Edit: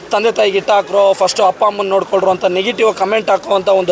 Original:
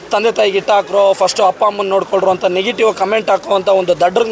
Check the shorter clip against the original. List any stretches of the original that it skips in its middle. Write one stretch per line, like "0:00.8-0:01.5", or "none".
none